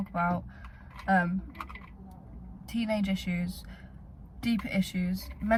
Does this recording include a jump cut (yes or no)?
no